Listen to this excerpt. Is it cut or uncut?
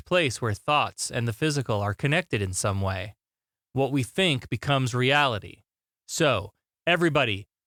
uncut